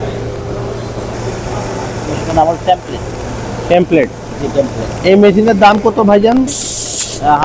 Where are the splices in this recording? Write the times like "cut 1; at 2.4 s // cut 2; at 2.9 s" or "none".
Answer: cut 1; at 1.1 s